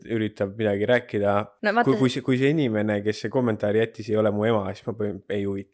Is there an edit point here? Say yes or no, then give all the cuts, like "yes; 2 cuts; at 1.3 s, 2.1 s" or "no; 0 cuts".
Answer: yes; 1 cut; at 1.5 s